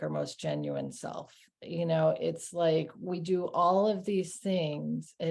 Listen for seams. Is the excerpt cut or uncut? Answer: uncut